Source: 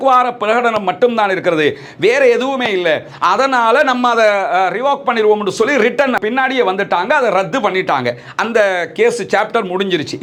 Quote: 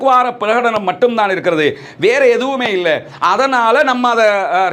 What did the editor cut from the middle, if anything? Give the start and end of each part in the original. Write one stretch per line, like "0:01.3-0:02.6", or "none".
none